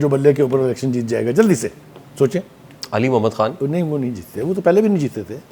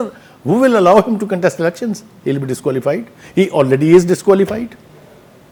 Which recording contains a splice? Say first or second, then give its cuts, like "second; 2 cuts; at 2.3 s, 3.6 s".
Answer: first; 1 cut; at 3.6 s